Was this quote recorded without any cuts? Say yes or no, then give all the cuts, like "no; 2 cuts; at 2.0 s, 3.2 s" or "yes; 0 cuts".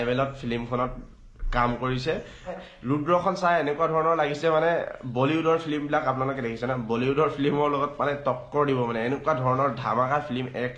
no; 1 cut; at 2.7 s